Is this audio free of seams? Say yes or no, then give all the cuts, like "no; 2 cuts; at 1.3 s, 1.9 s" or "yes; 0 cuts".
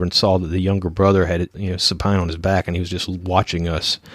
no; 1 cut; at 1.5 s